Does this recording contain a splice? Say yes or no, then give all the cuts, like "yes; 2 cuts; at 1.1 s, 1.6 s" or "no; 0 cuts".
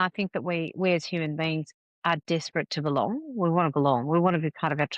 no; 0 cuts